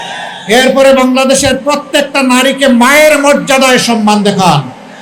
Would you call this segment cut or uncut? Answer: uncut